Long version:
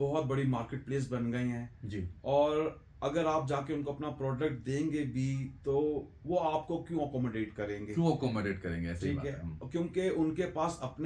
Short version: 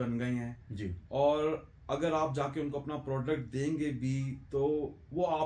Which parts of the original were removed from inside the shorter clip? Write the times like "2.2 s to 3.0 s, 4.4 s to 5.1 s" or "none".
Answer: none